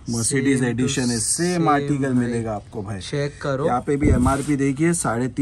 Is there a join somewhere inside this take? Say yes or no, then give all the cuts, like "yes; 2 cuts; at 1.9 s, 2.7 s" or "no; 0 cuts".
no; 0 cuts